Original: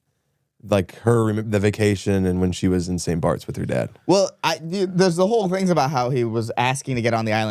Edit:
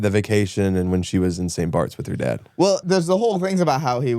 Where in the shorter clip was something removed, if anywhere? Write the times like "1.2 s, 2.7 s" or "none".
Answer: 2.8 s